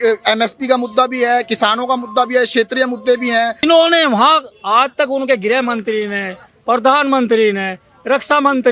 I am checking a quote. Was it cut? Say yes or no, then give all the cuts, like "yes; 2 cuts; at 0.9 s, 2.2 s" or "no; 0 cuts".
yes; 1 cut; at 3.6 s